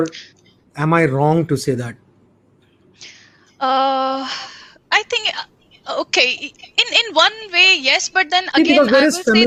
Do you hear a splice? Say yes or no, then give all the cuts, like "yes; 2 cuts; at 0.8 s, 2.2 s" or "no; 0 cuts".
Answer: no; 0 cuts